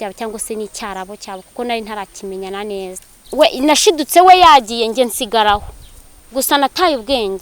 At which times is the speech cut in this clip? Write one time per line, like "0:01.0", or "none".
0:03.1